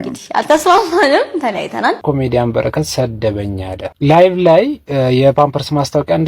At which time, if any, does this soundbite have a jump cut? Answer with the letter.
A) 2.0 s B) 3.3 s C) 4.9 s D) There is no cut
A